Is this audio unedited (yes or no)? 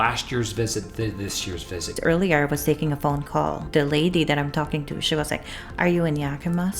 no